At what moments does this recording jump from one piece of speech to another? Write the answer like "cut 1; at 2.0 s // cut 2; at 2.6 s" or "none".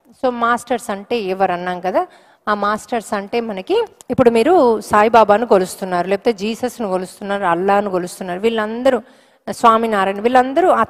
cut 1; at 4.0 s